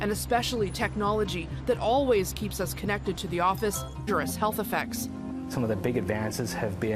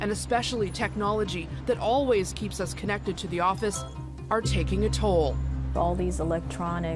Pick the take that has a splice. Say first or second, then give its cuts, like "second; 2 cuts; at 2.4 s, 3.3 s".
second; 1 cut; at 3.9 s